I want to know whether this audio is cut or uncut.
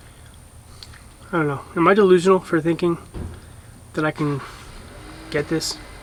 uncut